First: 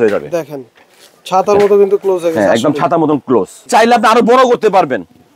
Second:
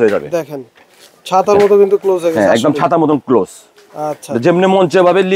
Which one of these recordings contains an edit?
first; 1 cut; at 3.7 s

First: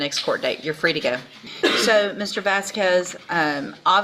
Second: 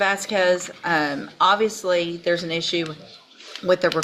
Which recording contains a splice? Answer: first; 1 cut; at 1.5 s

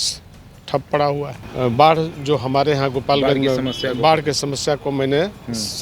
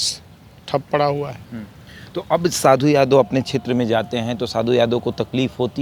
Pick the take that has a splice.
first; 1 cut; at 1.4 s

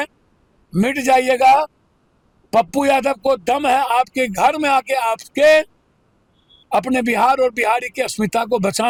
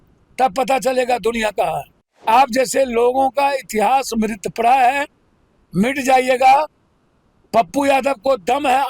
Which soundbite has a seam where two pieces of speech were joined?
second; 1 cut; at 2.2 s

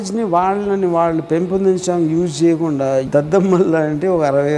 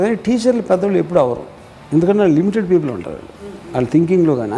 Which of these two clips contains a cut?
first; 1 cut; at 3.1 s

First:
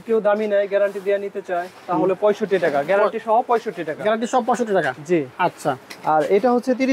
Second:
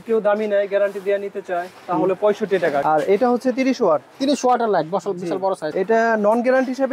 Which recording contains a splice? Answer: second; 2 cuts; at 2.8 s, 5.7 s

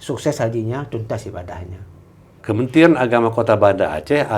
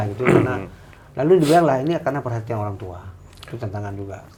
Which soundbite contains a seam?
first; 1 cut; at 2.3 s

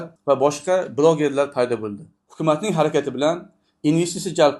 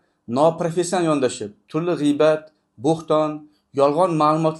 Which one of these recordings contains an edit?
first; 1 cut; at 2.1 s

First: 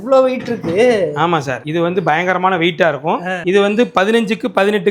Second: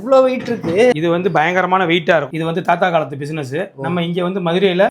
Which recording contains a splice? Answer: second; 2 cuts; at 0.9 s, 2.3 s

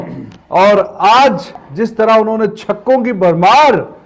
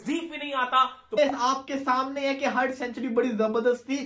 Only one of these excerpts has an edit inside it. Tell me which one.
second; 1 cut; at 1.2 s

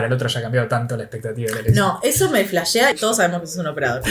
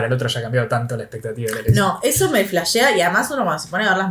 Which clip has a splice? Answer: first; 1 cut; at 2.9 s

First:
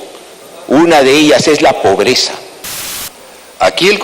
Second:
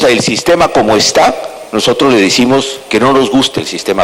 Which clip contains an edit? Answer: first; 1 cut; at 3.1 s

